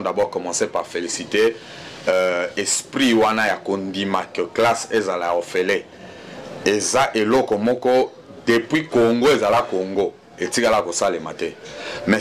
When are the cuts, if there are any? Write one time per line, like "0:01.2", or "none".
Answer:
none